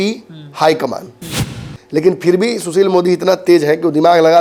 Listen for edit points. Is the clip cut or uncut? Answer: uncut